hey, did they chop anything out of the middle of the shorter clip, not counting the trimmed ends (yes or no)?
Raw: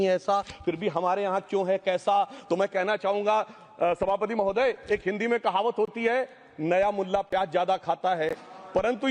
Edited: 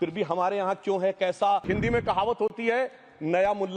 yes